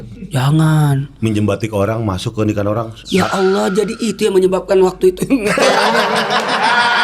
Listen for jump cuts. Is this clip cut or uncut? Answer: uncut